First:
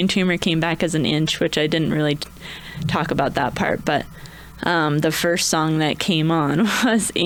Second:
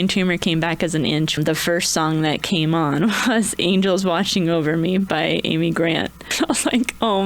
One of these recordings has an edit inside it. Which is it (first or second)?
second